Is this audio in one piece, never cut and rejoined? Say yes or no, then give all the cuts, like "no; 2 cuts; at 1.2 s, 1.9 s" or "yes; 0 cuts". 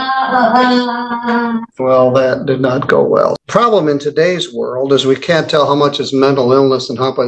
no; 2 cuts; at 1.7 s, 3.4 s